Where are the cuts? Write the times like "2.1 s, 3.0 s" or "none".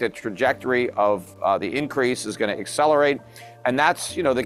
none